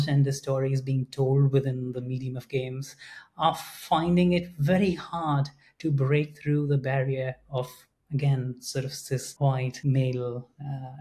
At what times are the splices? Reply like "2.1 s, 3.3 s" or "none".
9.7 s